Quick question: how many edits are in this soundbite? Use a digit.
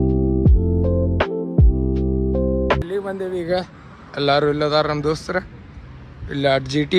1